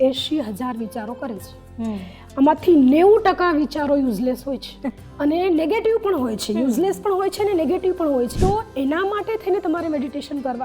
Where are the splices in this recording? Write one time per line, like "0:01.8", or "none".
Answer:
0:05.0
0:08.3